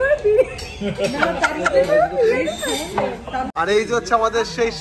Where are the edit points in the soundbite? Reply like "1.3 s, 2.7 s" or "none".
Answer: 3.4 s